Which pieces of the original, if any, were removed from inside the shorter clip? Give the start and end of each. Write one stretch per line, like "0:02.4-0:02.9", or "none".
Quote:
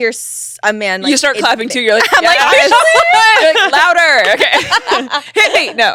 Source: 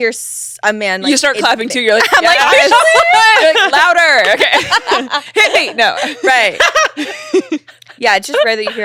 none